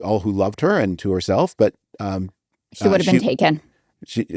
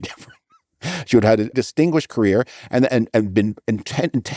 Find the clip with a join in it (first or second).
second